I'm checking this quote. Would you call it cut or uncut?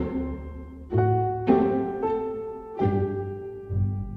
uncut